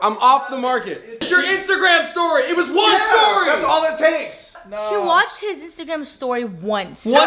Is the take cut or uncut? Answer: cut